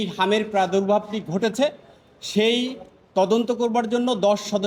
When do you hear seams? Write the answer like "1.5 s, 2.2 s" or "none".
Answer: none